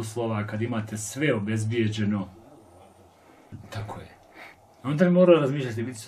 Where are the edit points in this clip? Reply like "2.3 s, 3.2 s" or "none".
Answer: 3.7 s